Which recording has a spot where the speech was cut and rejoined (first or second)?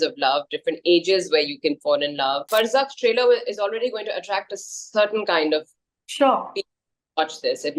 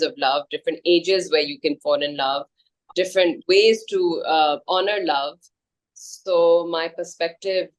first